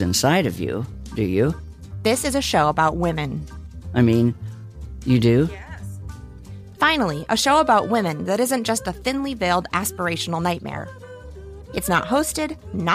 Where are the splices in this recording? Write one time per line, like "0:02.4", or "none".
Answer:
0:01.6